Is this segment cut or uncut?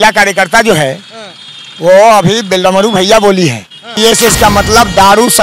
cut